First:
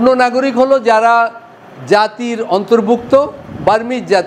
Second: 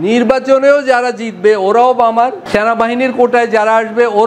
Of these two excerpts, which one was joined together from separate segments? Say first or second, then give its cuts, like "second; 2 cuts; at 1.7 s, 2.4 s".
second; 1 cut; at 2.4 s